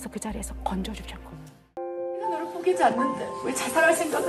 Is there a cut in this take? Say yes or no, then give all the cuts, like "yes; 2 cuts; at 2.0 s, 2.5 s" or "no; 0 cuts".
yes; 1 cut; at 1.8 s